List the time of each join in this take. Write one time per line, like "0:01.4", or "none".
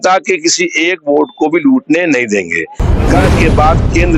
0:03.2